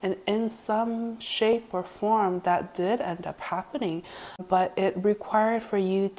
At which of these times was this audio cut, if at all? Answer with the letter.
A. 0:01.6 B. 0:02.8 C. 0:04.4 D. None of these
C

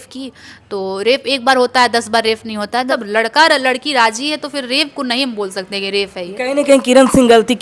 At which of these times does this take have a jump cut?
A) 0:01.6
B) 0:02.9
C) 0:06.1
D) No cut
B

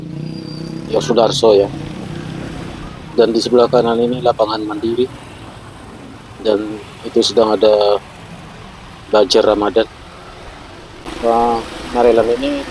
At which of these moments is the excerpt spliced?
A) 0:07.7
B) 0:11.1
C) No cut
B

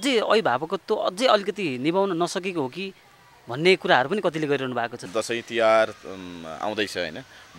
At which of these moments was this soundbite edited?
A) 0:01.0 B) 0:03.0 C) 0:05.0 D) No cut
C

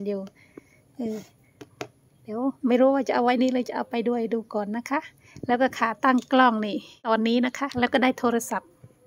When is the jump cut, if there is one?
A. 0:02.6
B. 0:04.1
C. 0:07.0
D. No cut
C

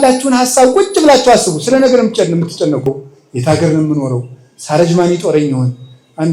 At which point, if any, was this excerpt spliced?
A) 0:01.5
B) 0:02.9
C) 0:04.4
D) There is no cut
B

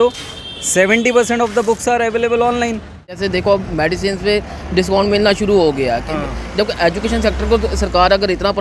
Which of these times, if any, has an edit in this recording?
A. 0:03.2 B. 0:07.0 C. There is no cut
A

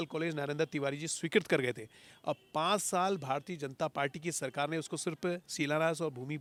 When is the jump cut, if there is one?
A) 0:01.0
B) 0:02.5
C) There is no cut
C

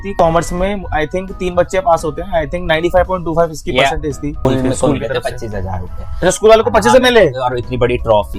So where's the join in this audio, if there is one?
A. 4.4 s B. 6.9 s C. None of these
A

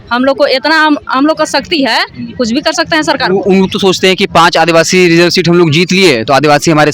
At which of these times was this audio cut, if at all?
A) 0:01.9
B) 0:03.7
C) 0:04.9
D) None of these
D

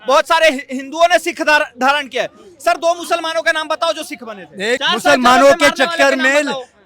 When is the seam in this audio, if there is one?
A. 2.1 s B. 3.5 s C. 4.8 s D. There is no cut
C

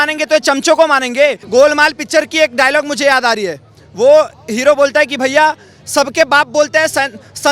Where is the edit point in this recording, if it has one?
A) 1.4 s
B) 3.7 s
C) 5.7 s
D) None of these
A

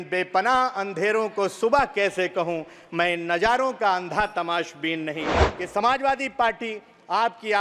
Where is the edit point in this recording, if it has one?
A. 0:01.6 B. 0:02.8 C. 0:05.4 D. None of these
C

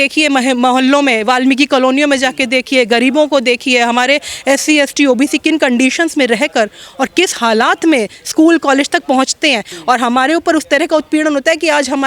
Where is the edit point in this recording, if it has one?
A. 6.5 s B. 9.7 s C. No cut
B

